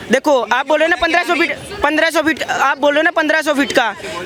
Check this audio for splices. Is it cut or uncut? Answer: uncut